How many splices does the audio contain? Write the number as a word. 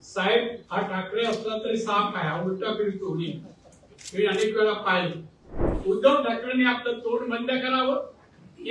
one